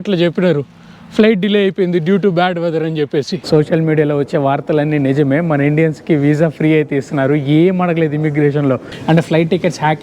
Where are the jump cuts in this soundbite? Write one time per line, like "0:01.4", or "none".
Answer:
0:03.4
0:08.9